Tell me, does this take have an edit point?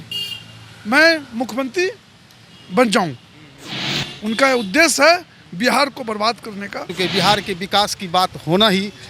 yes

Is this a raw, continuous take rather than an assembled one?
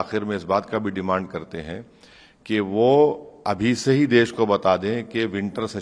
yes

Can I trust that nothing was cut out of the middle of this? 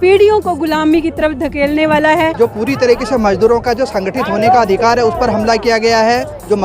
no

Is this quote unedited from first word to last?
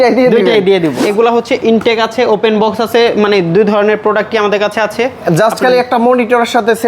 no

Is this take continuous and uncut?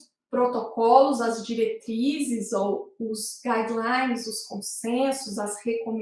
yes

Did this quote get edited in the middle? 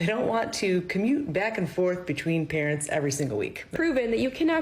yes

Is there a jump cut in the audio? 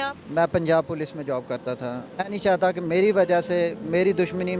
yes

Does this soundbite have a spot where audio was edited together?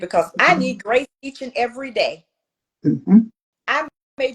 yes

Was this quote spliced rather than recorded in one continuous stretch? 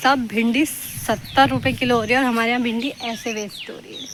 no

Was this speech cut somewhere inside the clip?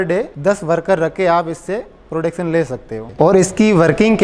yes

